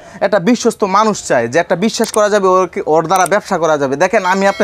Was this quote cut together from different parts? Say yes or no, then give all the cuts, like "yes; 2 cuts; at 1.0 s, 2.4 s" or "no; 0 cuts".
no; 0 cuts